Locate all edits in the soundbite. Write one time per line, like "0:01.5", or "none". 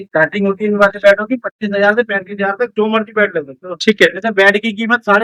none